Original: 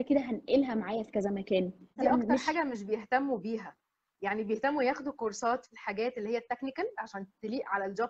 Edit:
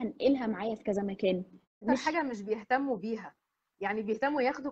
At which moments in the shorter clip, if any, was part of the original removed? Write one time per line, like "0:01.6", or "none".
0:01.8